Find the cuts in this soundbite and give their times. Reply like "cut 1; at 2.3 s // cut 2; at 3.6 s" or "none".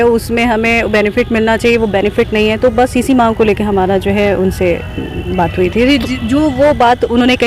none